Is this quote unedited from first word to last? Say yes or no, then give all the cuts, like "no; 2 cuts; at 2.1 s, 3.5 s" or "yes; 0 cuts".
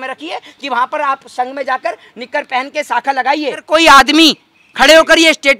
no; 1 cut; at 3.6 s